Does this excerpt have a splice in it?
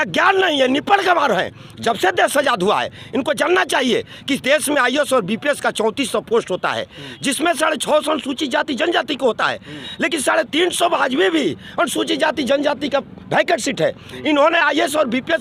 no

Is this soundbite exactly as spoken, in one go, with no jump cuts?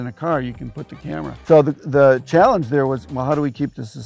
no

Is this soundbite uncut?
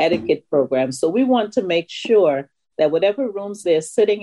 yes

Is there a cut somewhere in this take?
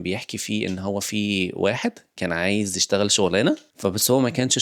yes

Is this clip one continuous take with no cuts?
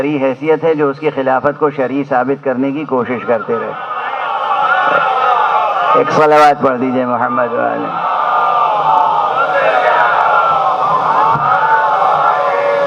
yes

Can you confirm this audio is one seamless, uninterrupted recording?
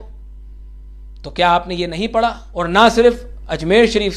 no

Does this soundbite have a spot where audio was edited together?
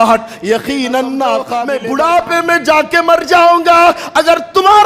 yes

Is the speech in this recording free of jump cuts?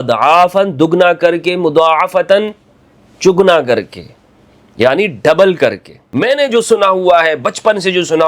no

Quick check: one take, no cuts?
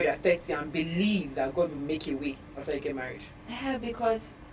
yes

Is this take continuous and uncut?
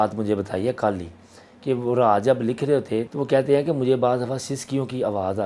no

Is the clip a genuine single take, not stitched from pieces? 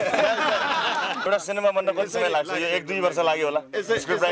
no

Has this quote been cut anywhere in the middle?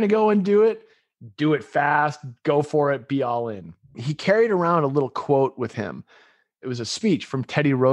yes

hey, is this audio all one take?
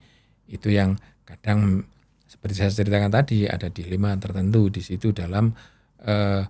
yes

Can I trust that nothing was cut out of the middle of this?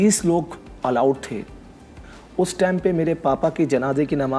yes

